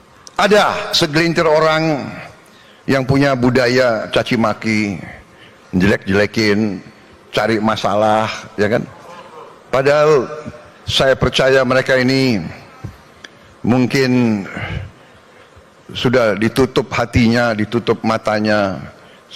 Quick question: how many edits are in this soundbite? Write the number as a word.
zero